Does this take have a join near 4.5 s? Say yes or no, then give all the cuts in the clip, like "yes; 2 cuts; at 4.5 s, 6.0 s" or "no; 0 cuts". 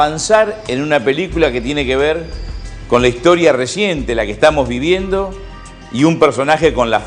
yes; 1 cut; at 4.5 s